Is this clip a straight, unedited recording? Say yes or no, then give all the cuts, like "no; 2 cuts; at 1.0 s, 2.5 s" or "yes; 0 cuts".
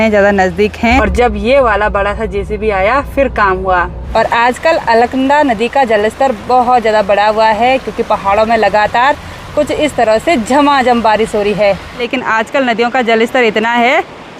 no; 3 cuts; at 1.0 s, 4.0 s, 12.0 s